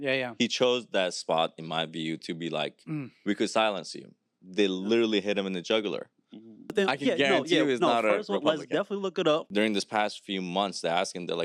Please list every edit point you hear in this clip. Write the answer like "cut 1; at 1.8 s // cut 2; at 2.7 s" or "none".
cut 1; at 6.7 s // cut 2; at 9.5 s